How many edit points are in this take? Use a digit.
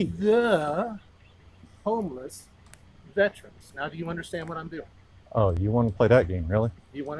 0